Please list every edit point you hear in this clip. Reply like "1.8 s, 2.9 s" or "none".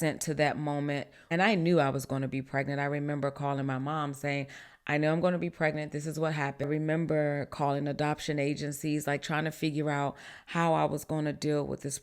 1.1 s, 6.6 s

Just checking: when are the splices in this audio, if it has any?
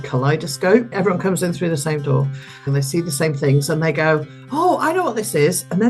0.9 s, 2.7 s

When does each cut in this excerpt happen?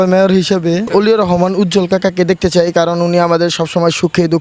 none

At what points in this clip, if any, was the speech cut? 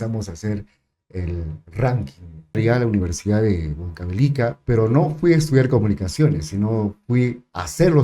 2.6 s

